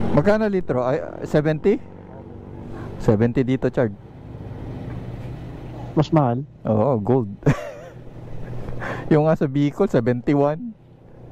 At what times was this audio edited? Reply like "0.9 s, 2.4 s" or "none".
none

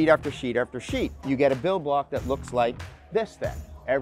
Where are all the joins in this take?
1.2 s

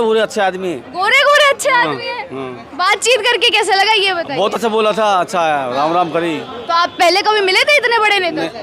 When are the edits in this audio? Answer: none

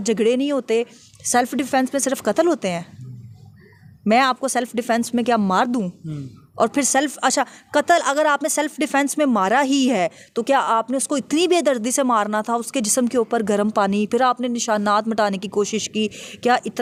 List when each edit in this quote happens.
none

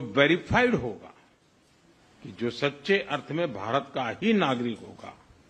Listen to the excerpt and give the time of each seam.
none

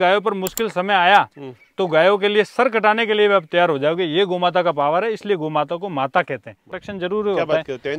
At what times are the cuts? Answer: 6.9 s

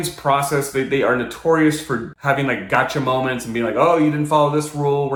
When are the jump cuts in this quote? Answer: none

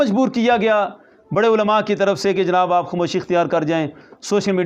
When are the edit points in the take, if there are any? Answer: none

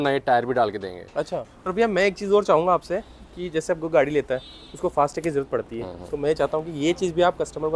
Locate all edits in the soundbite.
1.4 s

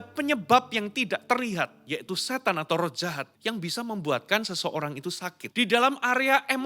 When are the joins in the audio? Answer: 3.3 s, 5.3 s

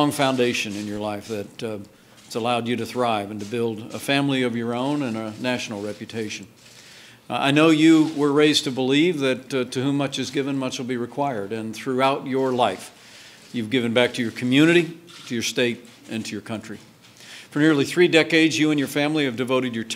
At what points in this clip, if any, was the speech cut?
11.2 s

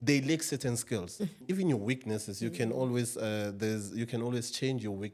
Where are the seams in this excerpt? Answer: 1.4 s

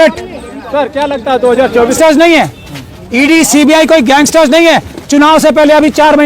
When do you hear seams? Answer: 2.0 s

